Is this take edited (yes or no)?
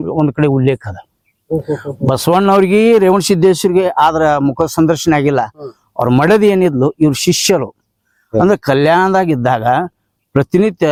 no